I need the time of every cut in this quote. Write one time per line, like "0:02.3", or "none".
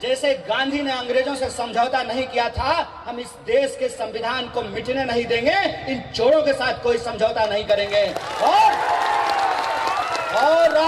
none